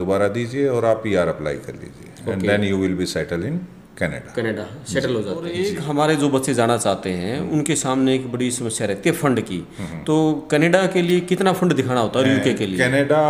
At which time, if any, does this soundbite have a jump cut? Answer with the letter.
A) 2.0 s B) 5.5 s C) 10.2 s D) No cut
B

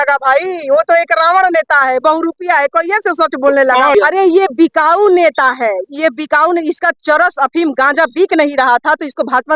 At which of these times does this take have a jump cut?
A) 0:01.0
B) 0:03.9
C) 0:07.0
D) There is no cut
B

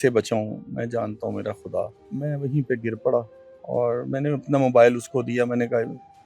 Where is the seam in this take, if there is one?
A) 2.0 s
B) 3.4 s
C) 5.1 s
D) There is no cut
A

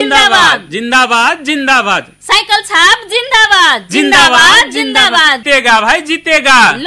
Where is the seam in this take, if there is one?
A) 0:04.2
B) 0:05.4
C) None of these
B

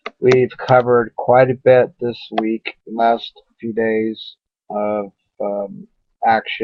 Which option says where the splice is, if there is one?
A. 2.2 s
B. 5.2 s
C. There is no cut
A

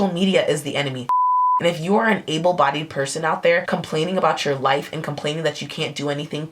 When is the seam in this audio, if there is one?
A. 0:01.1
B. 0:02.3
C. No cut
A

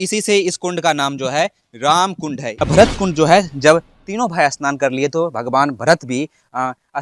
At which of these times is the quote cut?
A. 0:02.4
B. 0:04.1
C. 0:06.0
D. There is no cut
A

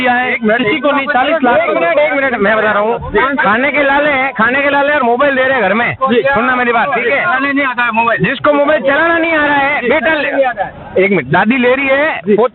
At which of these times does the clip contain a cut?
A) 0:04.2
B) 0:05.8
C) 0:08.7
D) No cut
D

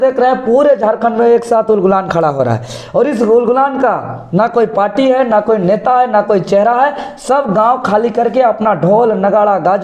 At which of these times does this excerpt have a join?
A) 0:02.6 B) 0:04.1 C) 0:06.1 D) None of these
D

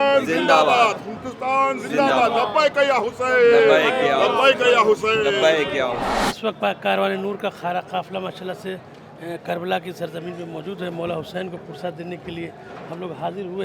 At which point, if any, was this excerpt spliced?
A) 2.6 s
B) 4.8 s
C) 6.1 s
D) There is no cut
C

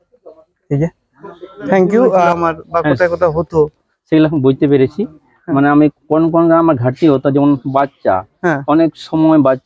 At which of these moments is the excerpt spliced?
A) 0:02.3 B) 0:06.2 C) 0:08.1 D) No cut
A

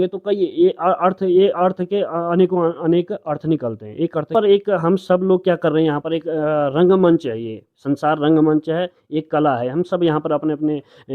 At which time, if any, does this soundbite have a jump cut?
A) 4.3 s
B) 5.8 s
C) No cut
A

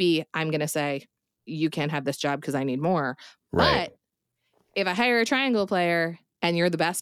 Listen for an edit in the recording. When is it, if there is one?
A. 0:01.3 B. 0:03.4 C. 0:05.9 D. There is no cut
A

